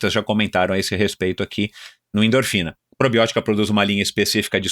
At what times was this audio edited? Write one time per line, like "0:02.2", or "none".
0:02.8